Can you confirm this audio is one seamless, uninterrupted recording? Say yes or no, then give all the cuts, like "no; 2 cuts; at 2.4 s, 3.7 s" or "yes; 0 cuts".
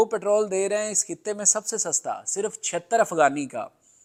yes; 0 cuts